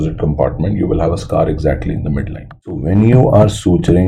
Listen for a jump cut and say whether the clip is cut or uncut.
cut